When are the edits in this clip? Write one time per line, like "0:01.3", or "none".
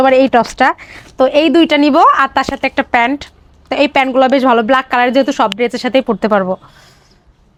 none